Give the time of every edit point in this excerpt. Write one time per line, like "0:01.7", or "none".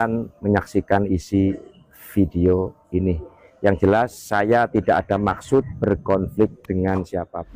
none